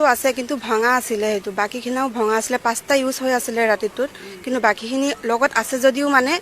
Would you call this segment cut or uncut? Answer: uncut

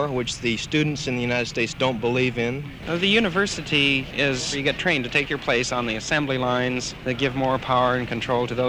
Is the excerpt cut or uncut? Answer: cut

